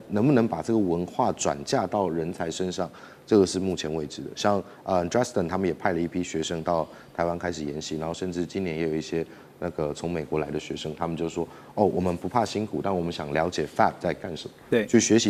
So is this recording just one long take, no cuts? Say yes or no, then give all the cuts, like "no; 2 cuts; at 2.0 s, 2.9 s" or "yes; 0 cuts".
yes; 0 cuts